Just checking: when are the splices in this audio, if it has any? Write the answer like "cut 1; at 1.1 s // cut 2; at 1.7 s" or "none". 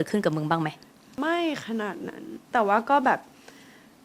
cut 1; at 1.2 s // cut 2; at 2.5 s